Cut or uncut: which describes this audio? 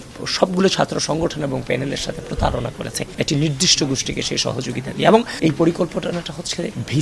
cut